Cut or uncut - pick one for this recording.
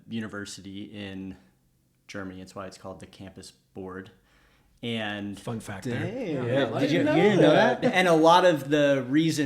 cut